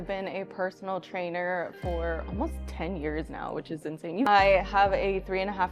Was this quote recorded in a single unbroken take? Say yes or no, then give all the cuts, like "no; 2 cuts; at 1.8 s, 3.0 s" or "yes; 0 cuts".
no; 1 cut; at 4.3 s